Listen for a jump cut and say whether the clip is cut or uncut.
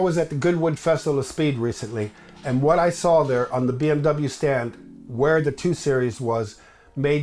uncut